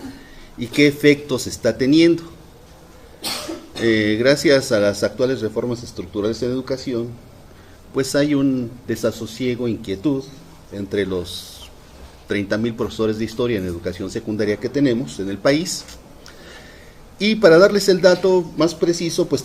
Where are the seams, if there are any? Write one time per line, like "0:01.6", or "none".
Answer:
0:15.2